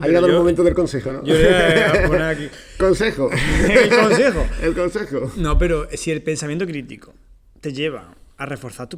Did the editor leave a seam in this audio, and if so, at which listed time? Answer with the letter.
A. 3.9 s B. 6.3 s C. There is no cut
C